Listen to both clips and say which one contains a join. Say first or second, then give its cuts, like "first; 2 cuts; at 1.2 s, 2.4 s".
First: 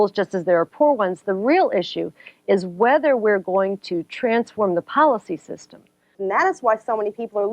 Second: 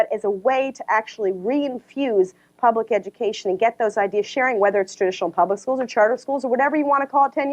first; 1 cut; at 6.1 s